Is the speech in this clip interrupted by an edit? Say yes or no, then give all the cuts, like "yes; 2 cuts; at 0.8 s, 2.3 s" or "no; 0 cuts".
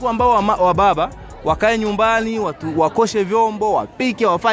no; 0 cuts